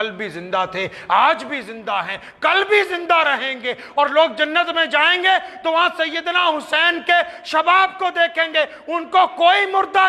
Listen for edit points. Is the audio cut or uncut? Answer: uncut